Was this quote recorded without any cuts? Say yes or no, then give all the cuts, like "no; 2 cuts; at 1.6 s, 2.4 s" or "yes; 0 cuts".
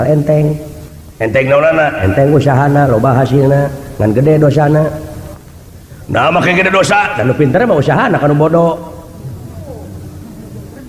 yes; 0 cuts